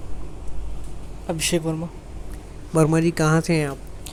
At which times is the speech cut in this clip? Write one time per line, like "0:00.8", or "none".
none

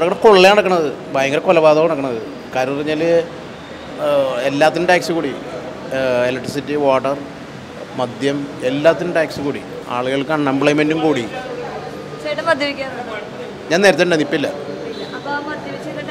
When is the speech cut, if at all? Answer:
none

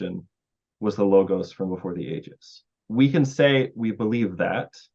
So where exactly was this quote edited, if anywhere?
0:02.8

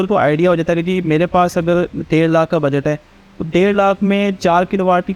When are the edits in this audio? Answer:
none

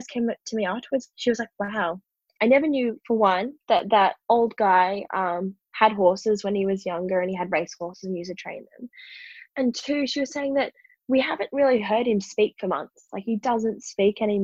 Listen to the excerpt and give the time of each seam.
0:01.1
0:02.2

